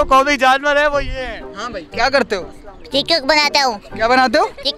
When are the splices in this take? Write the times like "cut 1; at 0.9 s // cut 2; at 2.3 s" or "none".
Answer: cut 1; at 1.3 s